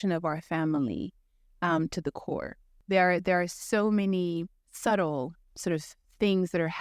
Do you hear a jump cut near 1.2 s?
no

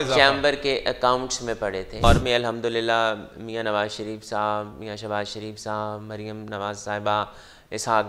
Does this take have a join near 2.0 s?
yes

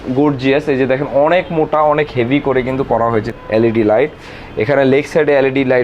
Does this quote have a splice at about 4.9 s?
no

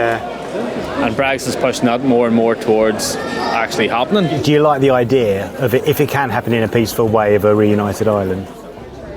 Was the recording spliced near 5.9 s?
no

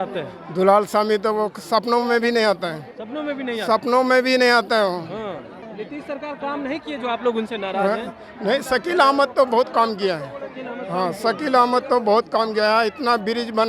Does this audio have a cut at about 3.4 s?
no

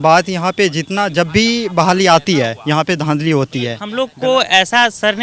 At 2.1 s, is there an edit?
no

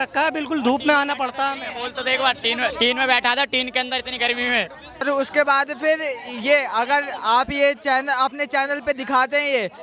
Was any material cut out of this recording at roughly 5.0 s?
yes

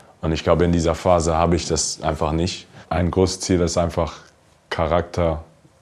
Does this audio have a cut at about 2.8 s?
yes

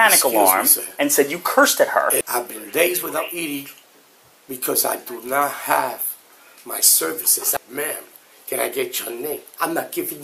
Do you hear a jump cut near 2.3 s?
yes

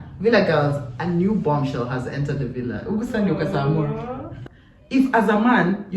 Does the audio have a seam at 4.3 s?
yes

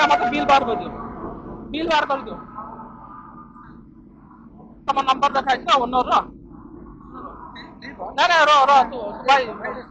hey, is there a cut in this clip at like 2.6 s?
no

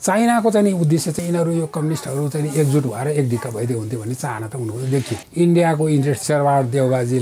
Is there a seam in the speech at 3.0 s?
no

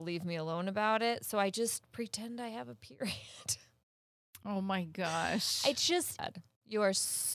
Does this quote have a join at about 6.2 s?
yes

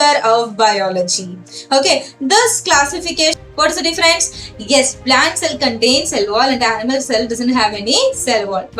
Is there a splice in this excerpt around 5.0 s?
no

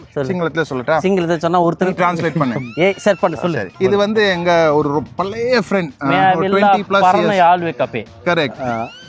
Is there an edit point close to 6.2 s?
no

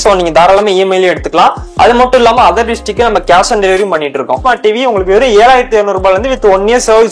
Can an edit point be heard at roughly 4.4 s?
yes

